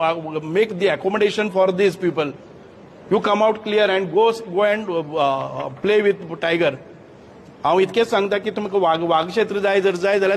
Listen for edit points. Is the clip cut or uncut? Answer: uncut